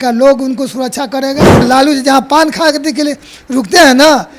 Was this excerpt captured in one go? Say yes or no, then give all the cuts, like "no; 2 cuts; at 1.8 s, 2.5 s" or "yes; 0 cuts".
no; 1 cut; at 1.6 s